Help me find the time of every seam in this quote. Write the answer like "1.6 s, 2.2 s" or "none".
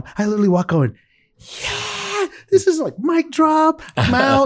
none

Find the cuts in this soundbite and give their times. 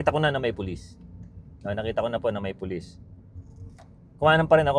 none

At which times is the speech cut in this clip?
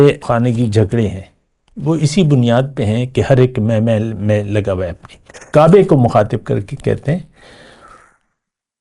5.4 s

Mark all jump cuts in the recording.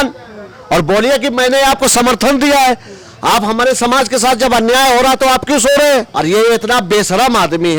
6.1 s

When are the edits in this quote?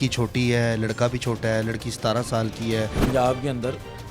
3.0 s

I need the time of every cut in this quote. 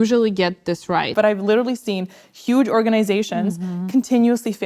1.1 s

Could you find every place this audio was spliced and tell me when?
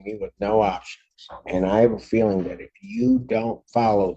none

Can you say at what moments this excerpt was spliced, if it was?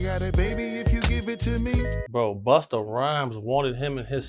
2.0 s

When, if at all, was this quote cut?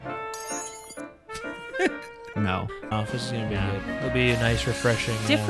2.9 s

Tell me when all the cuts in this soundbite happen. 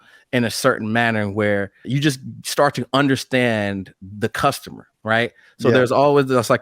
1.8 s

